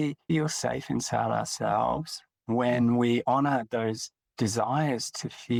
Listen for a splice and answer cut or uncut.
uncut